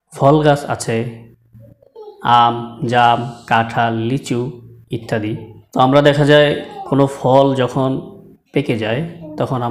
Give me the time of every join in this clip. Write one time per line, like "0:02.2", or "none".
none